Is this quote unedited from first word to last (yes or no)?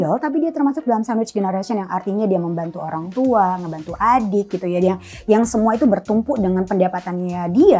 yes